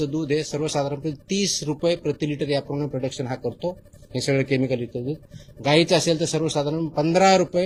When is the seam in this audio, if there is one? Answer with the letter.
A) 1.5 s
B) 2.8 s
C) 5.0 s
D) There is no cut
D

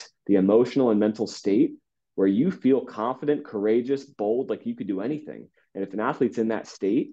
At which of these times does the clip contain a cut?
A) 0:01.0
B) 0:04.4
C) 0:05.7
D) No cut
D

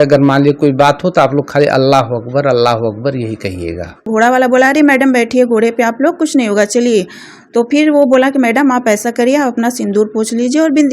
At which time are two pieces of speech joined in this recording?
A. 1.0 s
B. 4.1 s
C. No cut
B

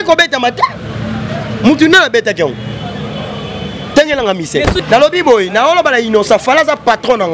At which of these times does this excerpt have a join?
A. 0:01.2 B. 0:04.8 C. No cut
B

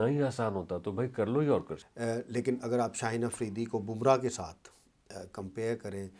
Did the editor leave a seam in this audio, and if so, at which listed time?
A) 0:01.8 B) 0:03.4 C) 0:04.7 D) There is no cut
A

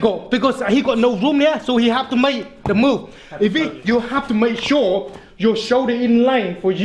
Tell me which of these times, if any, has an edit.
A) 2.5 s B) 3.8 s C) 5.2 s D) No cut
B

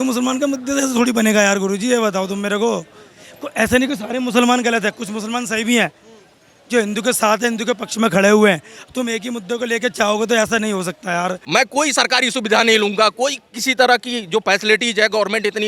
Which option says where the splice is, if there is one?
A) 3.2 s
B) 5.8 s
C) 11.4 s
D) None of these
C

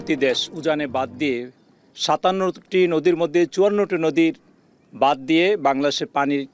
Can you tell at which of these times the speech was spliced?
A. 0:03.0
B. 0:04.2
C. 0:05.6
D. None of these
D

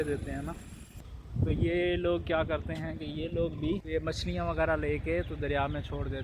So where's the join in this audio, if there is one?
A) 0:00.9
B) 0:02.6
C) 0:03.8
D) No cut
C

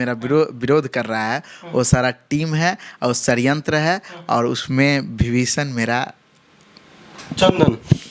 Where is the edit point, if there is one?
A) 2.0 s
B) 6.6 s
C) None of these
C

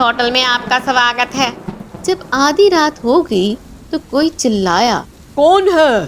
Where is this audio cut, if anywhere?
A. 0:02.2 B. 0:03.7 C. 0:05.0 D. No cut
D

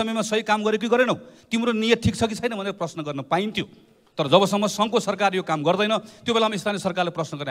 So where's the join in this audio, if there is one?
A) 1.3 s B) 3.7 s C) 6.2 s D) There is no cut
D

